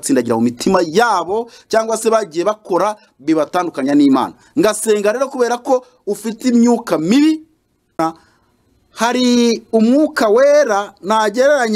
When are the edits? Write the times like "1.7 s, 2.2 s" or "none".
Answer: 8.0 s